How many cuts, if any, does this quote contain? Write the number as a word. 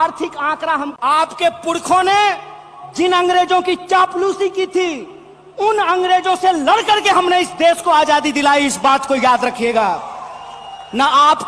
one